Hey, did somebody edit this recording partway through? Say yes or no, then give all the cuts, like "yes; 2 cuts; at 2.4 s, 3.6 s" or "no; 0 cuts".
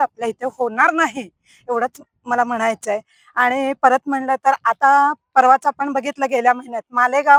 no; 0 cuts